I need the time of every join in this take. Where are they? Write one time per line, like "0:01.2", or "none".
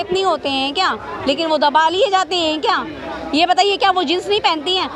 none